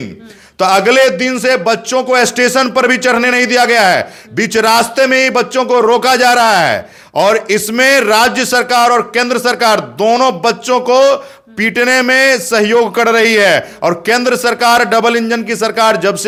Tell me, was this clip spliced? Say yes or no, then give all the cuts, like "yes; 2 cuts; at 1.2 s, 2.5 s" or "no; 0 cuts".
no; 0 cuts